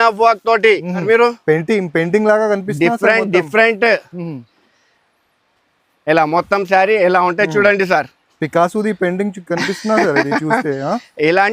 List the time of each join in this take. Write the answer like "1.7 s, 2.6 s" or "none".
1.0 s